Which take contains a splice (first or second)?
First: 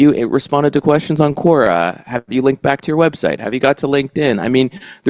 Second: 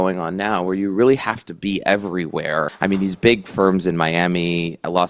second